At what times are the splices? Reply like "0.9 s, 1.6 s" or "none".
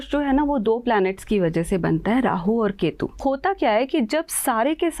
3.2 s